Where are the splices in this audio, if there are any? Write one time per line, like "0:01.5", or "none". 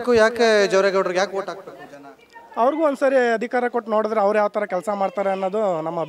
none